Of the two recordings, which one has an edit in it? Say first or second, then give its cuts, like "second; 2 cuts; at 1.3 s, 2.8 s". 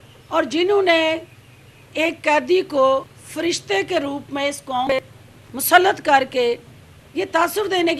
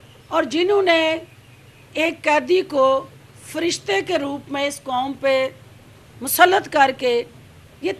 first; 2 cuts; at 3.2 s, 4.9 s